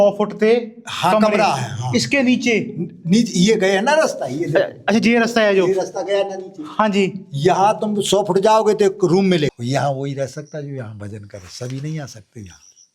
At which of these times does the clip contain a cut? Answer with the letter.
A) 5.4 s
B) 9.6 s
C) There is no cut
B